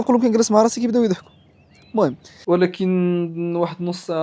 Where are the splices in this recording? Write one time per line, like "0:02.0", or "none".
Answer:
0:02.4